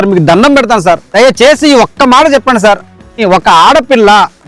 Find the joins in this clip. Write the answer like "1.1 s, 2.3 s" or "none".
1.1 s, 3.0 s